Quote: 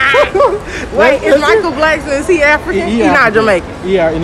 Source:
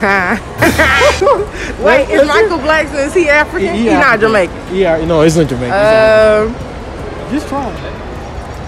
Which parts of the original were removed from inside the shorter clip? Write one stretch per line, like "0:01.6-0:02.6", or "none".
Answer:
none

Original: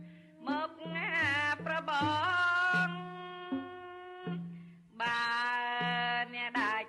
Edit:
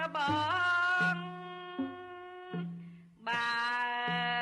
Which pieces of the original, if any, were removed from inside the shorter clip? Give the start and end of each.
none

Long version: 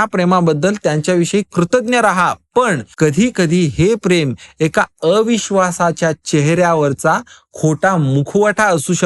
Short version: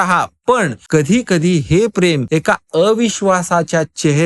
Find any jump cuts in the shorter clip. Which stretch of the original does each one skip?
0:04.3-0:04.5

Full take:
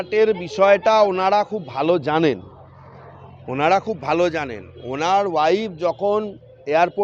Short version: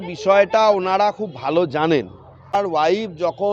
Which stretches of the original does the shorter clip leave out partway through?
0:02.9-0:05.2

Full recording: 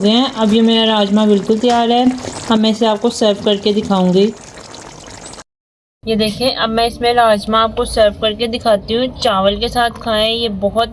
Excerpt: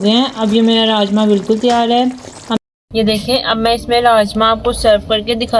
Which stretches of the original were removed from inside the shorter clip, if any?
0:02.6-0:05.7

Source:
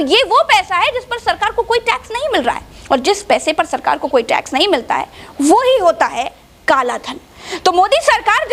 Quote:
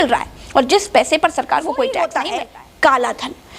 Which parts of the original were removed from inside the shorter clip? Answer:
0:04.5-0:06.0

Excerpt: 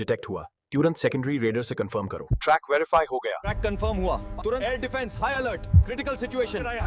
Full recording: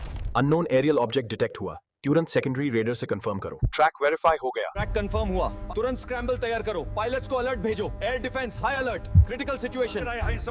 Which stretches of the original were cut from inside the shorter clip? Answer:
0:05.9-0:08.0

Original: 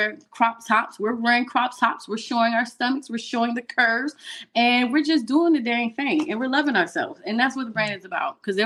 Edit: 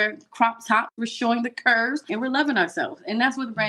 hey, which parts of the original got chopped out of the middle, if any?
0:00.9-0:03.0
0:04.2-0:06.3

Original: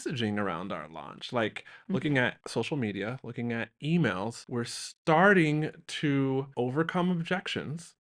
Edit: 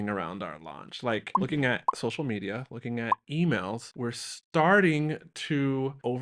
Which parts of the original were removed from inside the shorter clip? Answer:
0:01.6-0:01.8

